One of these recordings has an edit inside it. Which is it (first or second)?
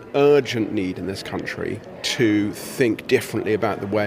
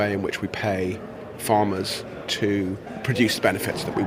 first